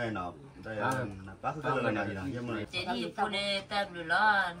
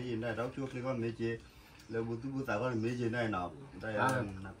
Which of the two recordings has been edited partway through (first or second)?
first